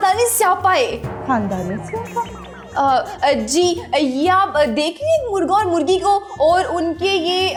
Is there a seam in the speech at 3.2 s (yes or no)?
no